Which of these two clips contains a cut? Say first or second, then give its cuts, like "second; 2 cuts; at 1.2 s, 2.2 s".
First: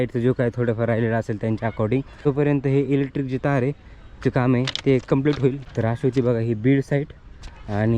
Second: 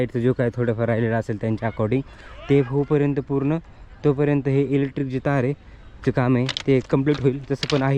first; 2 cuts; at 2.1 s, 5.6 s